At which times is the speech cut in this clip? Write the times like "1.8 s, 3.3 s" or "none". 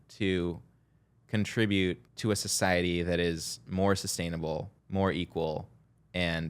2.1 s, 4.7 s